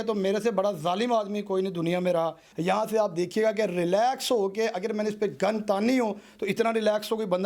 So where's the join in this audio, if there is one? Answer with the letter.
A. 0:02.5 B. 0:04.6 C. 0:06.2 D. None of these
A